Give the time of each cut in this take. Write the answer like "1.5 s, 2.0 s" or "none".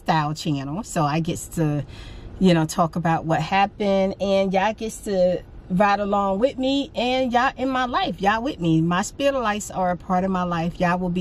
none